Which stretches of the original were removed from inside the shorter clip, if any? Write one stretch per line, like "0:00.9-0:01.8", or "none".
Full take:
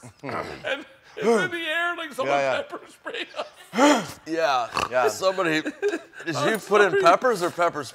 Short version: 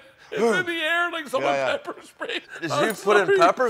0:03.3-0:06.1